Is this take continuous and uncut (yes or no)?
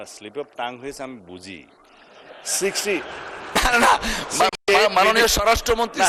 yes